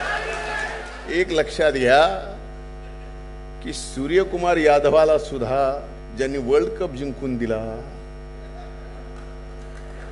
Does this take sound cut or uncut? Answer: cut